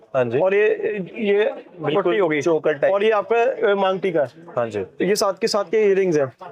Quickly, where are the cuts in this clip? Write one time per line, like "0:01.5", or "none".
none